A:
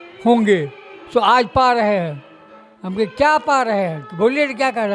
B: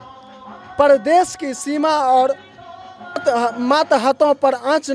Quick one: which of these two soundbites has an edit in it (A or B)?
B